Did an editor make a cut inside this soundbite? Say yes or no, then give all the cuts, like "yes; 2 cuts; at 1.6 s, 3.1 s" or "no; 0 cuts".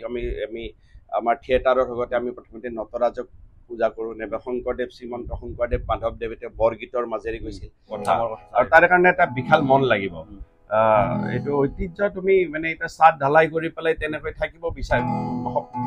yes; 1 cut; at 8.0 s